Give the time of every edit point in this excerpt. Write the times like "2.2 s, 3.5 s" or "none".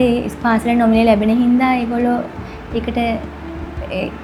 none